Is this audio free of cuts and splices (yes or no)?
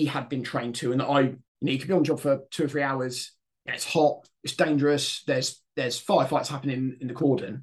no